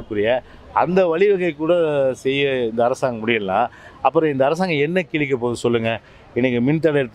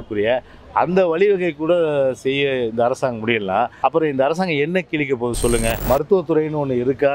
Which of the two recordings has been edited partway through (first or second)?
second